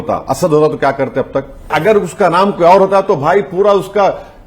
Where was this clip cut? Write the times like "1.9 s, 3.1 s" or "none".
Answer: 1.7 s